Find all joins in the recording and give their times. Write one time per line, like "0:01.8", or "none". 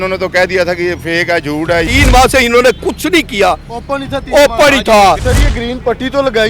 0:01.9
0:05.3